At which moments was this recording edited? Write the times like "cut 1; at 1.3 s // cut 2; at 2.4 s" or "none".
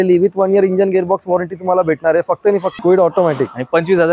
cut 1; at 2.8 s

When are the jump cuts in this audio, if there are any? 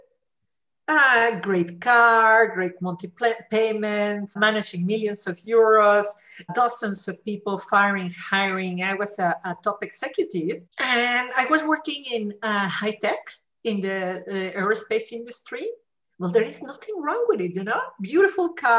cut 1; at 4.4 s // cut 2; at 6.5 s // cut 3; at 10.7 s

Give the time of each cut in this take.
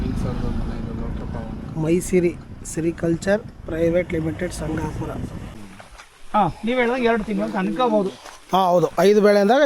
cut 1; at 5.5 s

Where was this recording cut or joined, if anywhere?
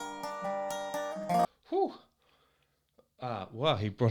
cut 1; at 1.4 s

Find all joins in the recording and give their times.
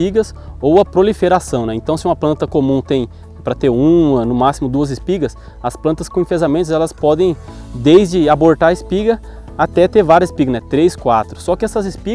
none

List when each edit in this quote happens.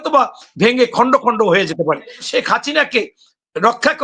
cut 1; at 2.2 s

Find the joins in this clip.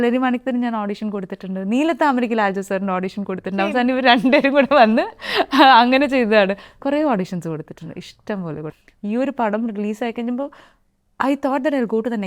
cut 1; at 8.7 s

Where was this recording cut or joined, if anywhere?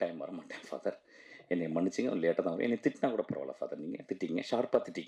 none

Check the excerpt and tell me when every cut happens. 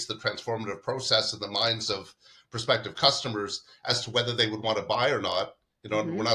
none

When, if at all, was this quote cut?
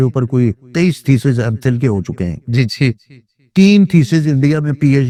none

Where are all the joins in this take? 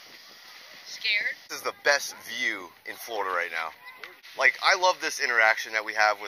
cut 1; at 1.5 s // cut 2; at 4.2 s

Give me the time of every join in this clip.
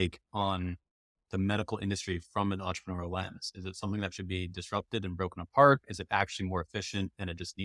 none

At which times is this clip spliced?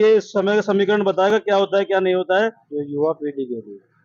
cut 1; at 2.7 s

